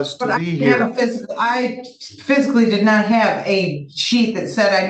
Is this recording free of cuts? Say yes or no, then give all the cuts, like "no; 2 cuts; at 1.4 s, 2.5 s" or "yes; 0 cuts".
yes; 0 cuts